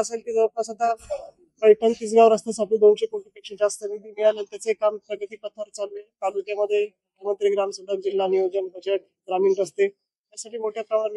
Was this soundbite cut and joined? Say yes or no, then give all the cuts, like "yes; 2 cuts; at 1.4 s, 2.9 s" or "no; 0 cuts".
no; 0 cuts